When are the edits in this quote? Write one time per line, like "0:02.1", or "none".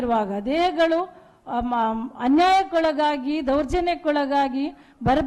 none